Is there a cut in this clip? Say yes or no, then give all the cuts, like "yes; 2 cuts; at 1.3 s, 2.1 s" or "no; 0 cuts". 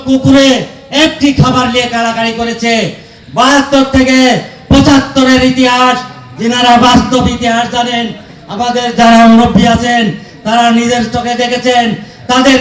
no; 0 cuts